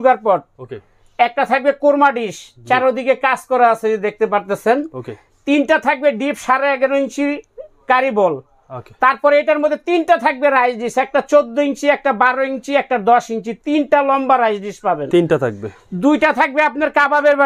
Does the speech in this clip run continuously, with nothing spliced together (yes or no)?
yes